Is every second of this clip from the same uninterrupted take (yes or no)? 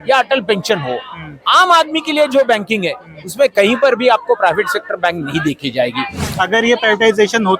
no